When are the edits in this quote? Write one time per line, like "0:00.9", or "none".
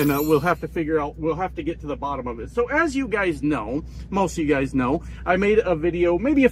none

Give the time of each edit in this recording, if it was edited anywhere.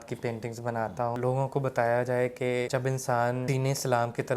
0:01.2
0:02.7
0:03.5

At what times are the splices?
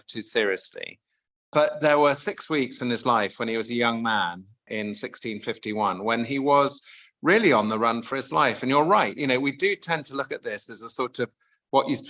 0:04.7

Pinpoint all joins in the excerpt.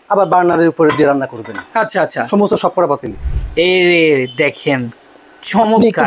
0:03.1

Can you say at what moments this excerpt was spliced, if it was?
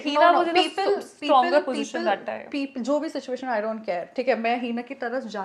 none

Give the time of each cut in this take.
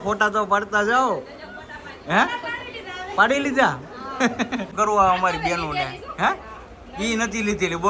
0:04.7

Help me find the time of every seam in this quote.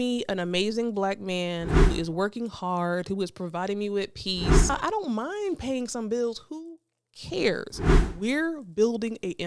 0:04.7
0:08.0

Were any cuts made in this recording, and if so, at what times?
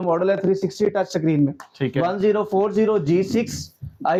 none

